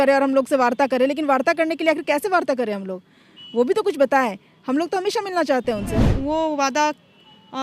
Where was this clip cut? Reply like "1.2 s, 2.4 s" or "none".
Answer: 6.1 s